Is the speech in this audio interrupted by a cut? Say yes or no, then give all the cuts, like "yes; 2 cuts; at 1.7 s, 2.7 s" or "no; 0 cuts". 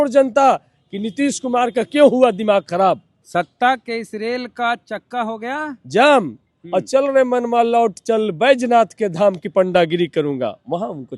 yes; 1 cut; at 3.1 s